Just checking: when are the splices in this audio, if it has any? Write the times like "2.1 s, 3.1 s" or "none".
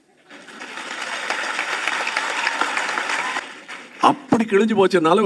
3.4 s